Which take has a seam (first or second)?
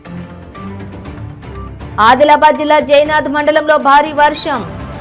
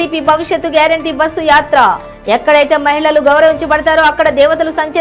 first